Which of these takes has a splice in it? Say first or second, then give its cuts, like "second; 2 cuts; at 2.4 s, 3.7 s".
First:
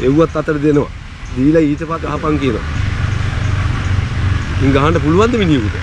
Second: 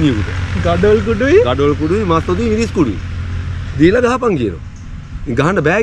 first; 1 cut; at 2.0 s